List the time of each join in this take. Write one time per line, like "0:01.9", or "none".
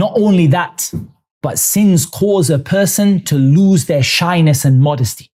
none